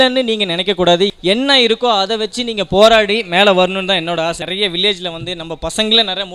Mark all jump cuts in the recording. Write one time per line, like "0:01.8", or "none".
0:01.1
0:04.4